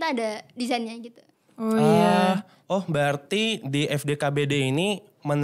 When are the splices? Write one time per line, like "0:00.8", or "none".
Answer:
none